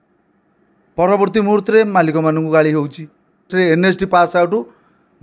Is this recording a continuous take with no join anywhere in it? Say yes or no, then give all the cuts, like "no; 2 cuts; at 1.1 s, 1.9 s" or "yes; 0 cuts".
no; 1 cut; at 3.5 s